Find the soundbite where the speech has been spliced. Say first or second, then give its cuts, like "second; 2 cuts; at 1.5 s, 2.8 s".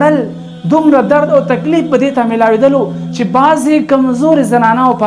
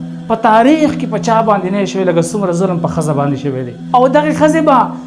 second; 1 cut; at 3.8 s